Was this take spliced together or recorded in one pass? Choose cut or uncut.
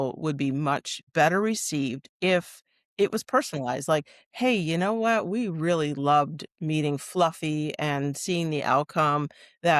cut